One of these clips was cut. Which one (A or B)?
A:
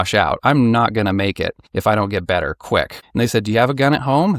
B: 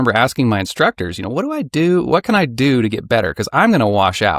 A